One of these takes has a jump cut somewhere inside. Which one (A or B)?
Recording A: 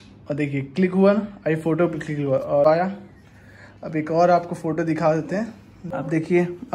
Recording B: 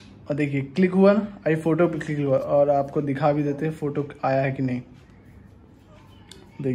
A